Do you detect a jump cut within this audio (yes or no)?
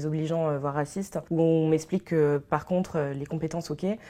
yes